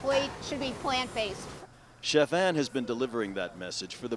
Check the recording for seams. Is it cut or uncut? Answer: cut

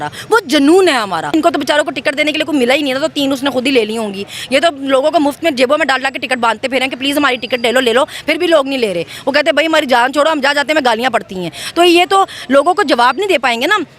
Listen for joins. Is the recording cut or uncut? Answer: cut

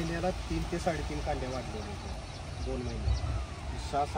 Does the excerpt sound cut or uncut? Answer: uncut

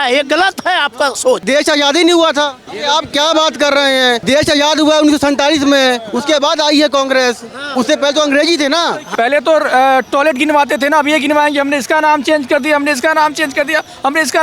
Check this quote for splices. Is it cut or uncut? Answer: cut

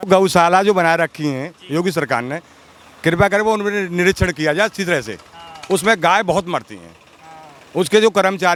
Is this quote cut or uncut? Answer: uncut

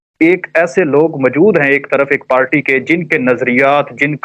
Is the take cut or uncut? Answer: uncut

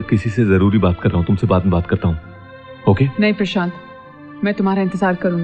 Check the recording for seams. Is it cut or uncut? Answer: uncut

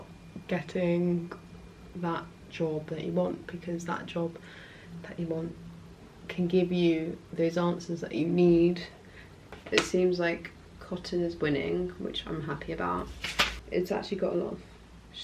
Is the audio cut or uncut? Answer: cut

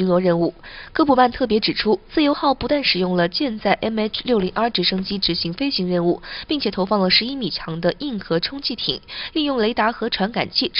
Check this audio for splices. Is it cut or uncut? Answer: cut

